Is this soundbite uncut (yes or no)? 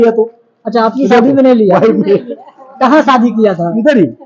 yes